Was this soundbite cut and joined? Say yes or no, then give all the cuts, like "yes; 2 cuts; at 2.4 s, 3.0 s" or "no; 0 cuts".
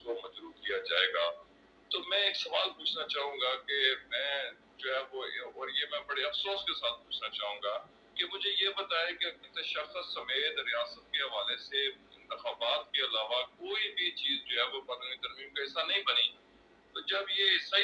no; 0 cuts